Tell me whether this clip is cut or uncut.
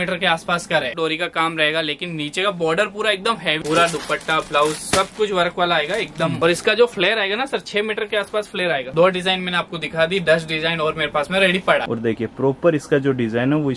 cut